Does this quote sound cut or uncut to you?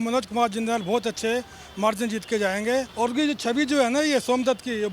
cut